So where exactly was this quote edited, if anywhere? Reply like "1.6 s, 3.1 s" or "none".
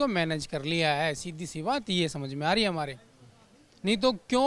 none

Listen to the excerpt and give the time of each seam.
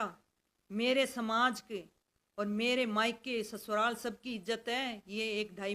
none

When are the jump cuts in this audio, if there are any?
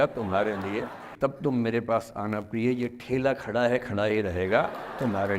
1.1 s

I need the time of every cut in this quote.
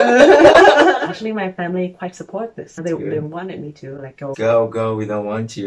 1.0 s, 2.7 s, 4.4 s

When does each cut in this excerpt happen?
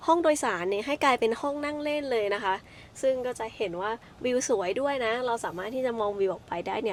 none

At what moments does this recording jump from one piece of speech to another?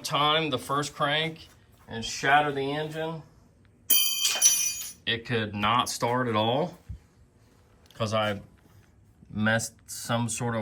none

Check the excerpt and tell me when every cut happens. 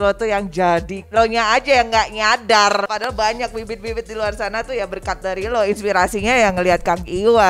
1.0 s, 2.9 s

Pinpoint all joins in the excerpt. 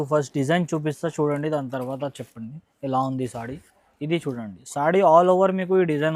none

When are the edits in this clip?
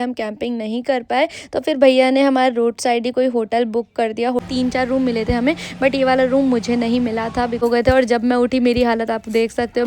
4.4 s, 7.6 s

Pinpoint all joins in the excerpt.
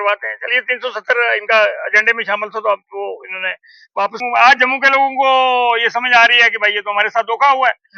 4.2 s

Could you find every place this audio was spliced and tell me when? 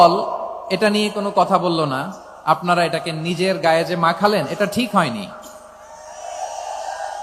none

